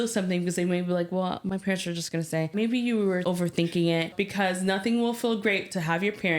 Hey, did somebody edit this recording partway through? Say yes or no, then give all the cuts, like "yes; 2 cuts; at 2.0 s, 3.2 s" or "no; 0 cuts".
yes; 3 cuts; at 2.5 s, 3.2 s, 4.1 s